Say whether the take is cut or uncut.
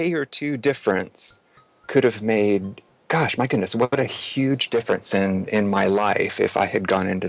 uncut